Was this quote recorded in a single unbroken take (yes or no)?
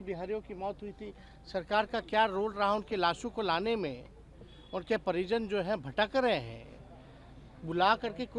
yes